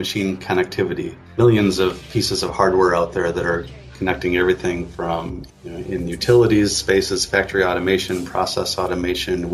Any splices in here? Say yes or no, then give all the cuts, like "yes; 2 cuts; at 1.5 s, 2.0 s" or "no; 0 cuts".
yes; 2 cuts; at 1.3 s, 5.4 s